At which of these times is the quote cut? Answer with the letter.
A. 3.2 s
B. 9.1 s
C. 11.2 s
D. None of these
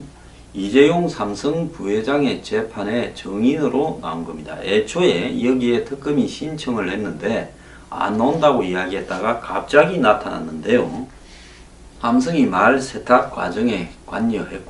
A